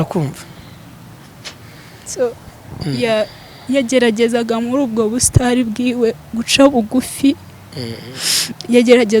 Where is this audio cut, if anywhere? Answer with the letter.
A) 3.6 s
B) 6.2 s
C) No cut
C